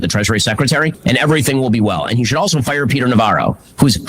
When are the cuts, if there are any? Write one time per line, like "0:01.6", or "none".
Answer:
0:01.0